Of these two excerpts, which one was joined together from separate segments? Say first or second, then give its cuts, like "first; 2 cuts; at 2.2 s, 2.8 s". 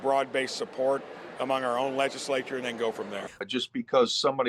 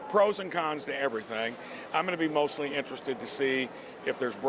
first; 1 cut; at 3.4 s